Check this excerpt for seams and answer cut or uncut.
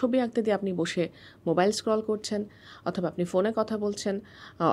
uncut